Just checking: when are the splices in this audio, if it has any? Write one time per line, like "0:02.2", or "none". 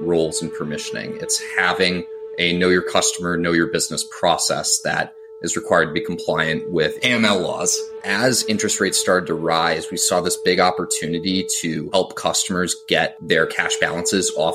0:08.0
0:13.2